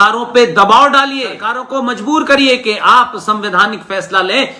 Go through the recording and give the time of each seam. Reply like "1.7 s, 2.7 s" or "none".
1.5 s